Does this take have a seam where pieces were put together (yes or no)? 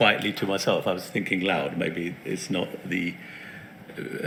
no